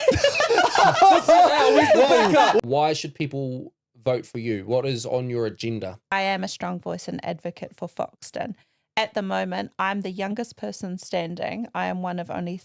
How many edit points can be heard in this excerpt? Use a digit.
2